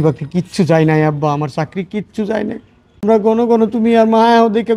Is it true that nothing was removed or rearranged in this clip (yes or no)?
no